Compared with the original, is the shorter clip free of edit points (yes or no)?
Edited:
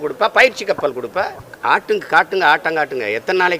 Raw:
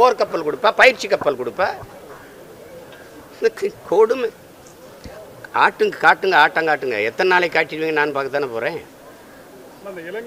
no